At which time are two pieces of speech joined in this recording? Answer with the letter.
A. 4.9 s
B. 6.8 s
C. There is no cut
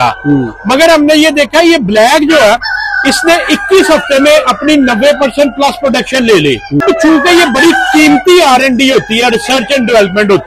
B